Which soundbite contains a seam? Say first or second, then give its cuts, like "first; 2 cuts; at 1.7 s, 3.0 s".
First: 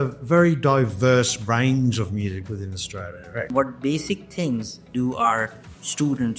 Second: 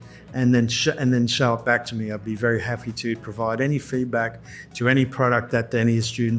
first; 1 cut; at 3.5 s